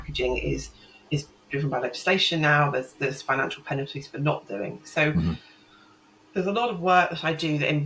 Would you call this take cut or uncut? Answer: uncut